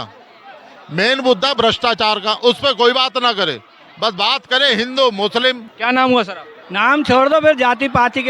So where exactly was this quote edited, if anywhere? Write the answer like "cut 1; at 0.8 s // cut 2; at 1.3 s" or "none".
cut 1; at 5.7 s

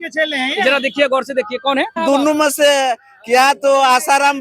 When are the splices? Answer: cut 1; at 2.0 s

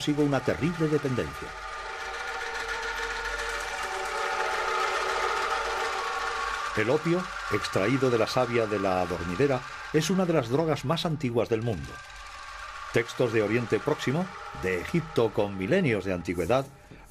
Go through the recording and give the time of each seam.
cut 1; at 5.9 s

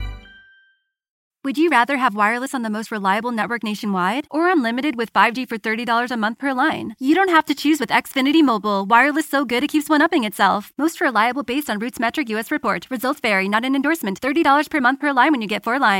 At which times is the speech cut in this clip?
cut 1; at 1.3 s

